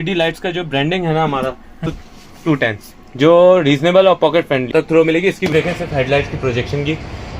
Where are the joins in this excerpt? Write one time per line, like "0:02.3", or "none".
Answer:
0:01.9
0:04.7
0:05.5